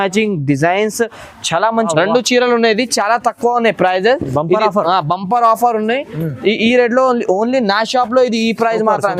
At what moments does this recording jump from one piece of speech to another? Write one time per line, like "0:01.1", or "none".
0:01.9